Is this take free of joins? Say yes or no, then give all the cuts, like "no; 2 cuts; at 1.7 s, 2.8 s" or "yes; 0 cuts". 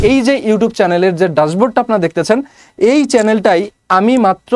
yes; 0 cuts